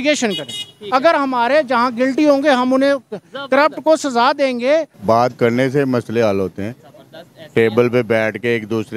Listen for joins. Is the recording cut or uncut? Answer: cut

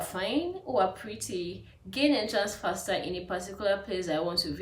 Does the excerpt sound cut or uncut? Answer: uncut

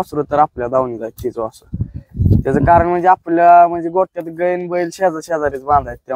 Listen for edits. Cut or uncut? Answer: uncut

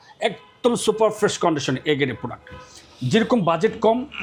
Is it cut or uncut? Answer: uncut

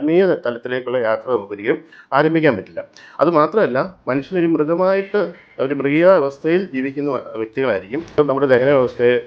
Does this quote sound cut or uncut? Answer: cut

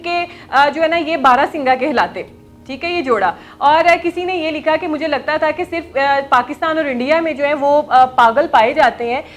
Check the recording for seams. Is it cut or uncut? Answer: uncut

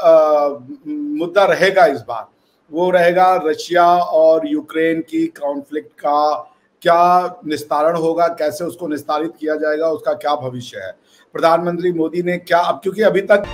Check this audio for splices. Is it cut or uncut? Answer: uncut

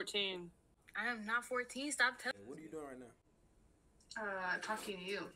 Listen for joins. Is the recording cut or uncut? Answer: cut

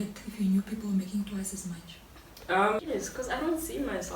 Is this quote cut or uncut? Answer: cut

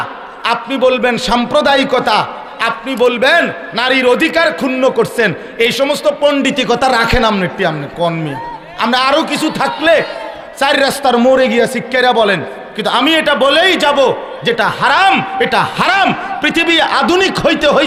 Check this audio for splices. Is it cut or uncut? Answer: uncut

